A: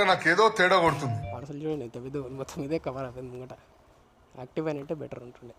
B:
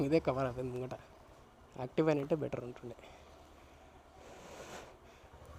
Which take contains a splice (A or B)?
A